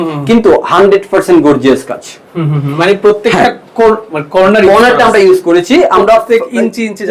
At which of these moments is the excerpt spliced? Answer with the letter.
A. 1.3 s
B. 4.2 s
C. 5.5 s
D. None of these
D